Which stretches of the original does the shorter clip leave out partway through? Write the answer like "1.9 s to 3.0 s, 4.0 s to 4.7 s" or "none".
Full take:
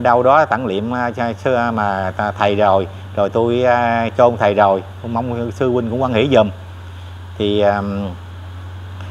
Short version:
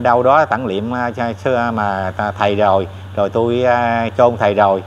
none